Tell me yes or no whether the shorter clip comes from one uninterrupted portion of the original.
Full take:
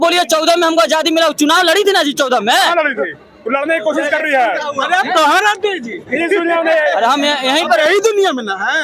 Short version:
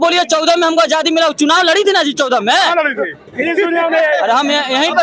no